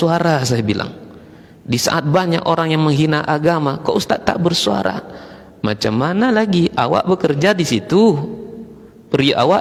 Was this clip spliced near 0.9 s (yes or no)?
no